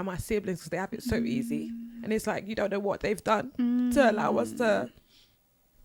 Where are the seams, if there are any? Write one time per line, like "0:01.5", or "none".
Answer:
none

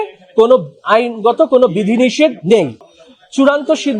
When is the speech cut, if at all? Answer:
0:02.9

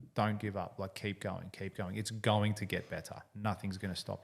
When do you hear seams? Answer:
none

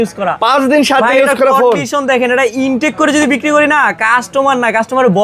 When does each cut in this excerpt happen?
none

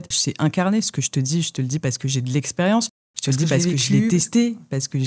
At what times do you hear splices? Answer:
none

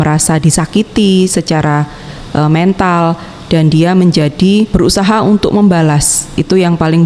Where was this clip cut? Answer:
0:04.7

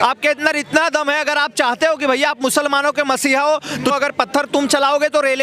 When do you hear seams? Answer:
0:03.9

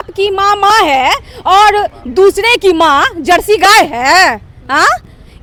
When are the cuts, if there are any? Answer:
none

